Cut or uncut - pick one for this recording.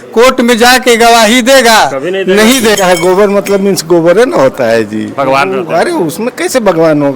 cut